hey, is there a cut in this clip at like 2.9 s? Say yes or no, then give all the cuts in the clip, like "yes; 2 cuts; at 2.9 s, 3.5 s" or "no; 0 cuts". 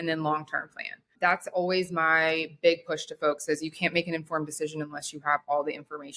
no; 1 cut; at 1.1 s